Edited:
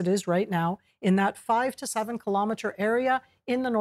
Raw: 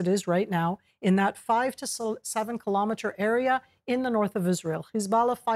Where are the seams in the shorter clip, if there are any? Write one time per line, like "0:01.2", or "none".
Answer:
0:01.8